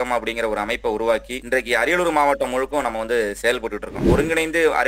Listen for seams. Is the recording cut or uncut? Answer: cut